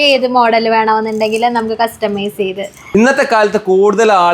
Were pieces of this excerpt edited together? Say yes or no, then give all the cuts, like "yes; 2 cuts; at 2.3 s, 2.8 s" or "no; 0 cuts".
yes; 1 cut; at 2.9 s